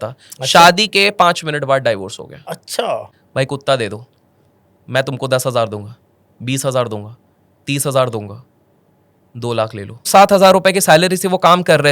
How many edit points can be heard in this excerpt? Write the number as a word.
two